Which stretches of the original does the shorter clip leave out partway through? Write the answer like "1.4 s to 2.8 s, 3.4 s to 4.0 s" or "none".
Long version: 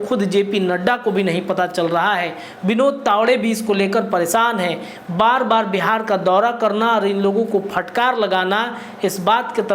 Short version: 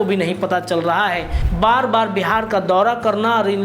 2.5 s to 5.0 s